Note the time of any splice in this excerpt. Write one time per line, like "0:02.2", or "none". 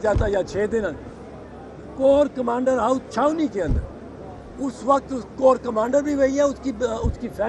none